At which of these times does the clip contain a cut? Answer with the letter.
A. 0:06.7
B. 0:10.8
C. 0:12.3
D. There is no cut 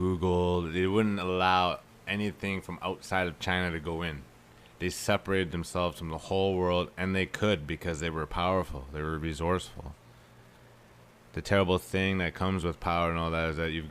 C